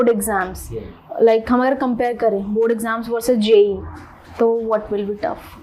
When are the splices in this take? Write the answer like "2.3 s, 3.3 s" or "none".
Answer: none